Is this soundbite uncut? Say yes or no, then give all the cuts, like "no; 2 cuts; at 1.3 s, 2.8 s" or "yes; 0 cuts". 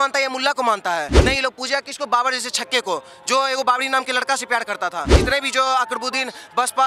no; 2 cuts; at 1.1 s, 5.1 s